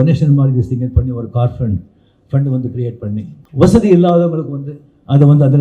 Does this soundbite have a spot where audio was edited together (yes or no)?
yes